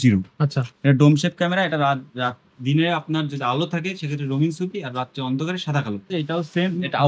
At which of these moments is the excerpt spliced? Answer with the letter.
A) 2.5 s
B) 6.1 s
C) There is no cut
B